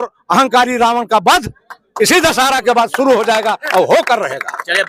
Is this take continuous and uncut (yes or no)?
yes